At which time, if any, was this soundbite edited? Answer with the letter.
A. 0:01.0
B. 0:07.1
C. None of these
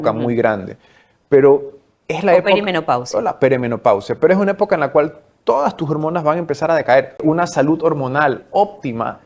B